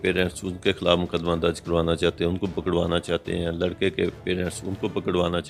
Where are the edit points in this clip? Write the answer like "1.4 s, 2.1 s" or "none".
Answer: none